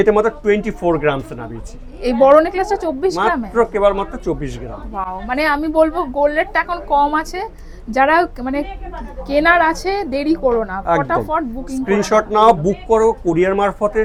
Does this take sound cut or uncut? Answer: uncut